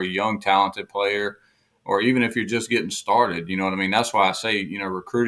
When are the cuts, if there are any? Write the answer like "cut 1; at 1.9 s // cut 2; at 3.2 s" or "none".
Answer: none